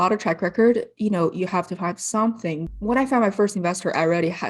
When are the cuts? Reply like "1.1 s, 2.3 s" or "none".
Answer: 2.6 s